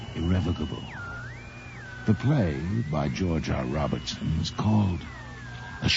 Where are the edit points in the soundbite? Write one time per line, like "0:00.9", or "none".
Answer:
0:02.6